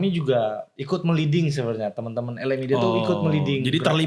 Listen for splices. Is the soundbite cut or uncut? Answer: uncut